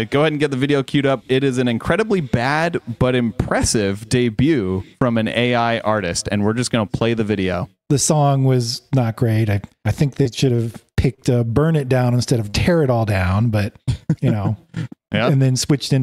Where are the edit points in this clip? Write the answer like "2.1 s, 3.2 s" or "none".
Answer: 7.7 s